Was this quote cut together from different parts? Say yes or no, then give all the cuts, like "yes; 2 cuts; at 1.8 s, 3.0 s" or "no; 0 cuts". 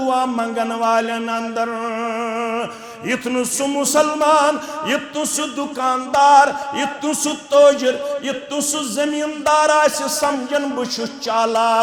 no; 0 cuts